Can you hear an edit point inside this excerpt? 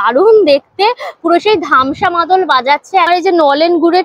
yes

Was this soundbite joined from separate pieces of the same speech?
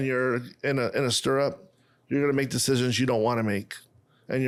no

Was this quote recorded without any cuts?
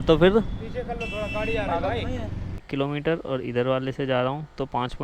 no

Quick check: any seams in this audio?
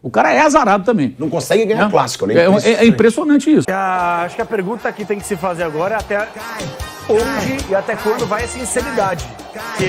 yes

